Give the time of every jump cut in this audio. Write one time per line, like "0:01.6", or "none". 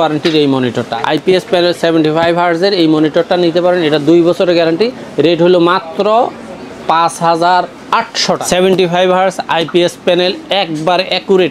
0:00.8
0:08.4